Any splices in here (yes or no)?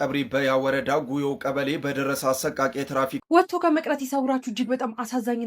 yes